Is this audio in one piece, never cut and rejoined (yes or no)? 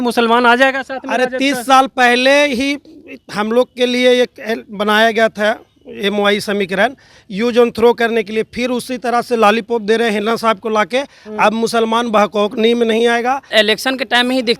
no